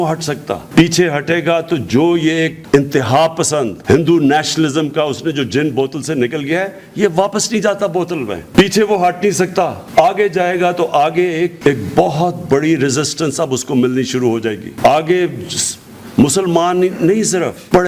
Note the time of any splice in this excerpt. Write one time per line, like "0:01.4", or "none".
none